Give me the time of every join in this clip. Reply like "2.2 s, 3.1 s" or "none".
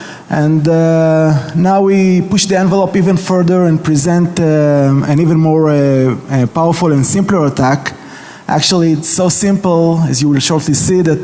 1.2 s